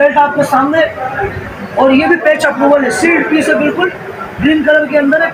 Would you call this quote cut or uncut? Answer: uncut